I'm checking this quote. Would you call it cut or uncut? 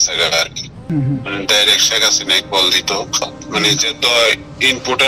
cut